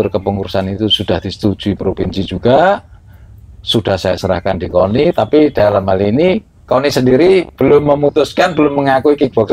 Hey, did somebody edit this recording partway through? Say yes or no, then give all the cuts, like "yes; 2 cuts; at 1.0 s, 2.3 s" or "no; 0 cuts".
no; 0 cuts